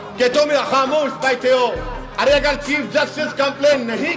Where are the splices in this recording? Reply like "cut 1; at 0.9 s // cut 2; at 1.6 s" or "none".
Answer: none